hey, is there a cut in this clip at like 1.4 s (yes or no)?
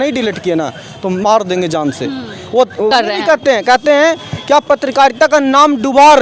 no